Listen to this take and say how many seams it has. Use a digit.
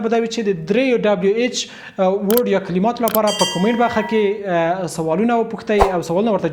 0